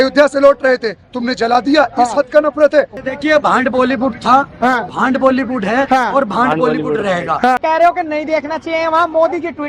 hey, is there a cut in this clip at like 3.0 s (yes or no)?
yes